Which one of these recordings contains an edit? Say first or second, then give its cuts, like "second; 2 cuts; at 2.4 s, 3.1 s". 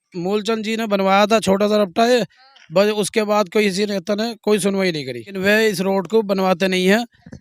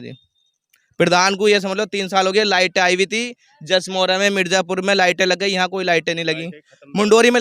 first; 1 cut; at 5.4 s